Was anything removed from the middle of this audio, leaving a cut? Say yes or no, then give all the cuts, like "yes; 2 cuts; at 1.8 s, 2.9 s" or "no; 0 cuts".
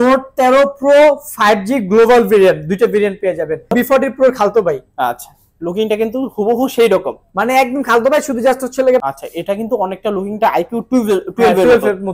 yes; 2 cuts; at 3.7 s, 9.0 s